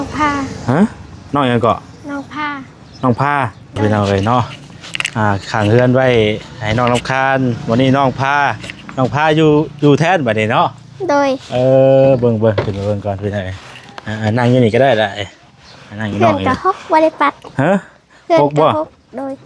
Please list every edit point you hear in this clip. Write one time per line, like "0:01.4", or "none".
0:03.8